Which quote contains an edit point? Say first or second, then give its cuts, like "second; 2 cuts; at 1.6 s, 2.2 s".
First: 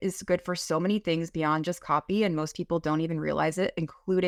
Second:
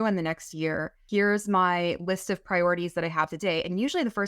second; 1 cut; at 1.0 s